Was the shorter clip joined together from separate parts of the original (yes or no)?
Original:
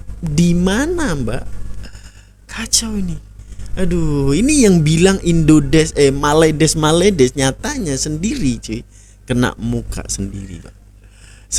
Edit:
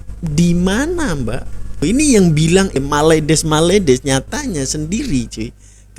yes